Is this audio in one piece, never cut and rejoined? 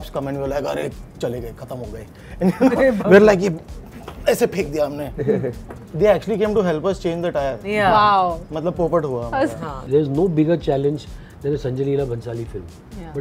no; 1 cut; at 9.8 s

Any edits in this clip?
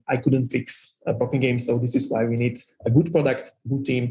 yes; 1 cut; at 1.2 s

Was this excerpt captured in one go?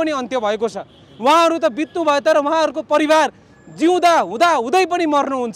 yes; 0 cuts

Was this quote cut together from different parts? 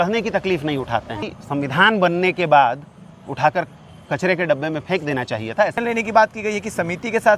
yes; 2 cuts; at 1.2 s, 5.8 s

